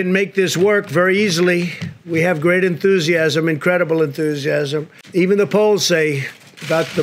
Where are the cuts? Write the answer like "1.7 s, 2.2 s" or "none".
none